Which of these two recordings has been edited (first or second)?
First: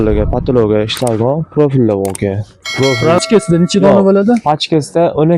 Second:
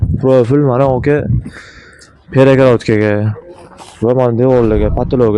first